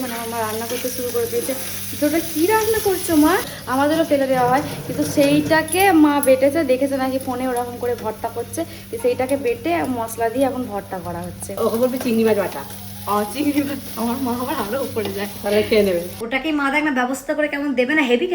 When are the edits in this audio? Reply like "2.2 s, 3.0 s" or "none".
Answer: 3.5 s, 11.5 s, 16.2 s